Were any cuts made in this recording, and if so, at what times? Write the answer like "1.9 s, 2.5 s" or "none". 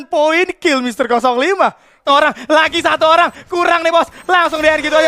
2.0 s